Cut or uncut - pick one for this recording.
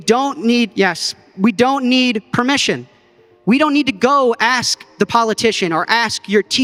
uncut